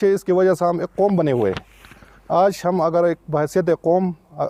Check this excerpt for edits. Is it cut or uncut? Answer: uncut